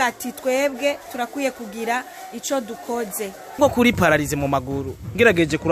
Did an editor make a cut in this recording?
yes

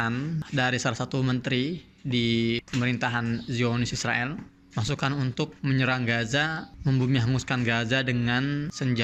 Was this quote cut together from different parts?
no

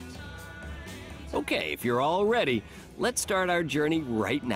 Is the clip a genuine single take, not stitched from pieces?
no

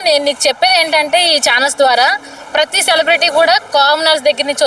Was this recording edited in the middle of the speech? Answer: no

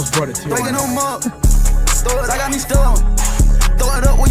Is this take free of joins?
yes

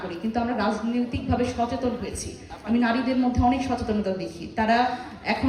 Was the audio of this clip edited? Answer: yes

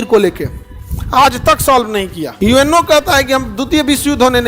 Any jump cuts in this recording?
yes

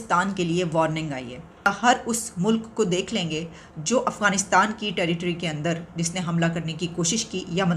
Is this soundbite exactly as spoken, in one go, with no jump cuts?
no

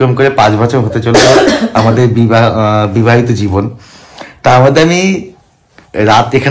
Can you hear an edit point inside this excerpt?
no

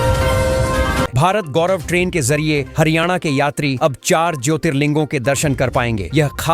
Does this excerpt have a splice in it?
yes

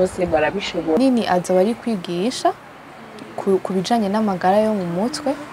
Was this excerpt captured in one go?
no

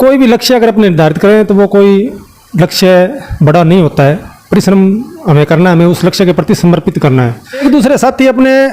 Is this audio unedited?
no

